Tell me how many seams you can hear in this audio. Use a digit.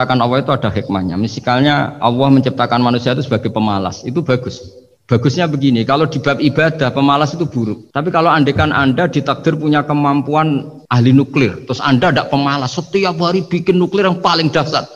1